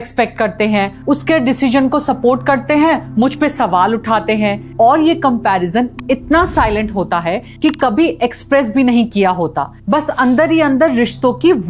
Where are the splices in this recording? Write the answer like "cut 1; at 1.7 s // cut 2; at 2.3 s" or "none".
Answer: none